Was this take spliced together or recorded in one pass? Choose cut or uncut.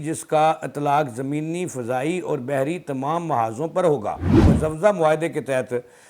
cut